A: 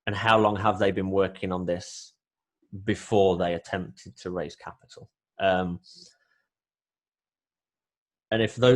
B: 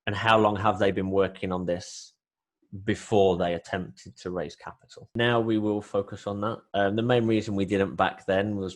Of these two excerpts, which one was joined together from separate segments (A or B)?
B